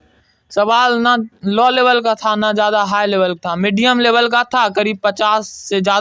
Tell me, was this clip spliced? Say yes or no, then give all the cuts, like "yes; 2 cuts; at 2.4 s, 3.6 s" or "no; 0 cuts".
no; 0 cuts